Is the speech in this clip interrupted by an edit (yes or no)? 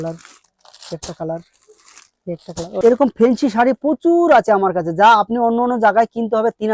yes